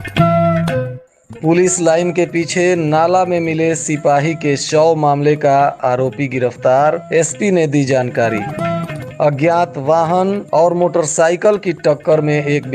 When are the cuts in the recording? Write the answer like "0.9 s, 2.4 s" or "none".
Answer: 0.9 s